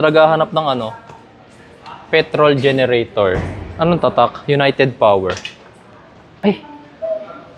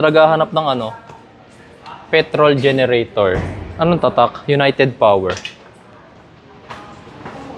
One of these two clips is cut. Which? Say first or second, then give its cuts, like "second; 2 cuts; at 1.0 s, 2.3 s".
first; 1 cut; at 6.4 s